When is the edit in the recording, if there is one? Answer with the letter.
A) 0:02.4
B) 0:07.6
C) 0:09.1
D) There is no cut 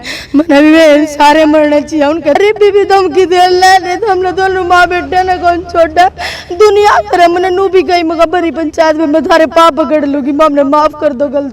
A